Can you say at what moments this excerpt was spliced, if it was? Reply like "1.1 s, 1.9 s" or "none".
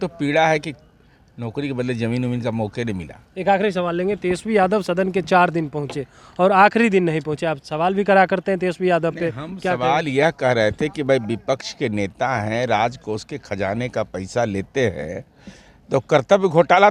none